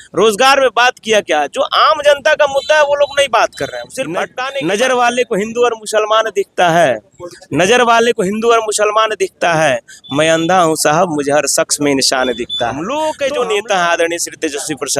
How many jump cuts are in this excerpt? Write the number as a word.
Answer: two